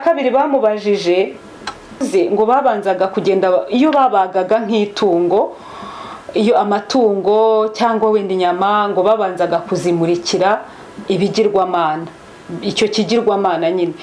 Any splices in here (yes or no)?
yes